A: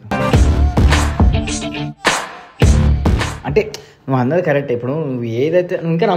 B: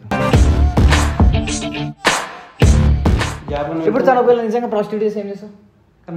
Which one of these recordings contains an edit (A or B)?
B